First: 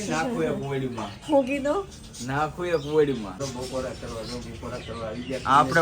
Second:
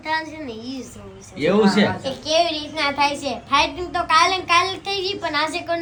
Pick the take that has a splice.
first; 1 cut; at 3.4 s

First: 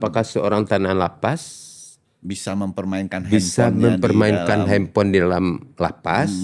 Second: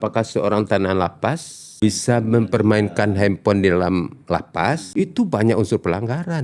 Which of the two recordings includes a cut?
second; 2 cuts; at 1.6 s, 4.8 s

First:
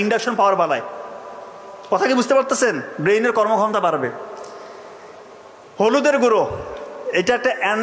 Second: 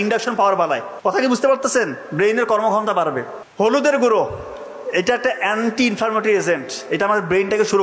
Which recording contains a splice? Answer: second; 2 cuts; at 0.9 s, 3.4 s

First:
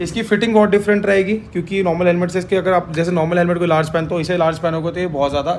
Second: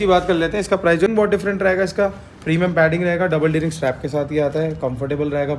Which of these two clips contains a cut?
second; 1 cut; at 1.1 s

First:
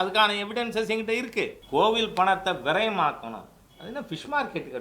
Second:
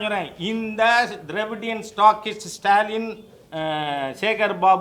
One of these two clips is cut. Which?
first; 1 cut; at 1.6 s

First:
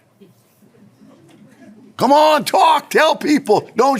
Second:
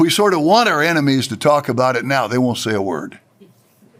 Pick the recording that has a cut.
first; 1 cut; at 1.8 s

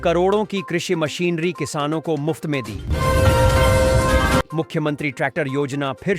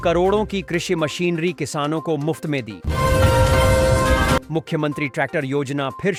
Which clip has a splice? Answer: first; 2 cuts; at 2.8 s, 4.5 s

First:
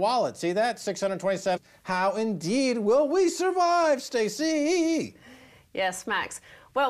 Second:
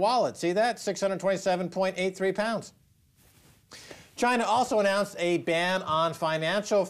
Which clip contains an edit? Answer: second; 1 cut; at 1.7 s

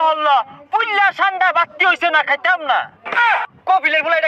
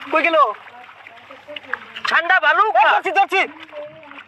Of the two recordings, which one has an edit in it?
first; 1 cut; at 3.2 s

